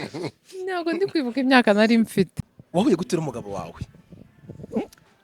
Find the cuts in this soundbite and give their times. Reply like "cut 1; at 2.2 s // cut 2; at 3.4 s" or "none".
cut 1; at 2.4 s